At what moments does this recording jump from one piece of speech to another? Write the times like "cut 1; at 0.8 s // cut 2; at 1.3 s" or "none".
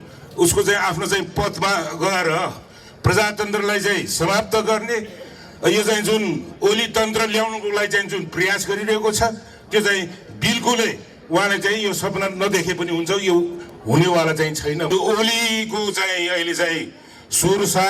cut 1; at 14.9 s